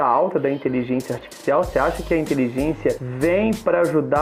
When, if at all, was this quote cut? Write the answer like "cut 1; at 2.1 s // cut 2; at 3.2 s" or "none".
cut 1; at 3.1 s